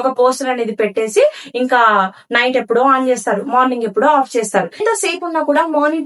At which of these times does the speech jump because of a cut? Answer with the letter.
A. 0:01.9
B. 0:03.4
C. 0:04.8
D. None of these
C